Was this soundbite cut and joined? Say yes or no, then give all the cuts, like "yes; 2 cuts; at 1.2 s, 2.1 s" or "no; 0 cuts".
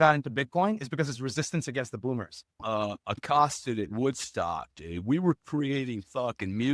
yes; 1 cut; at 2.6 s